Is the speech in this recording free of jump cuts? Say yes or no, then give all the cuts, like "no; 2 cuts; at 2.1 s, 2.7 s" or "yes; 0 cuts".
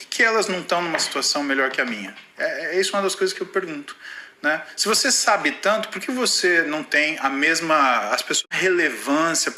yes; 0 cuts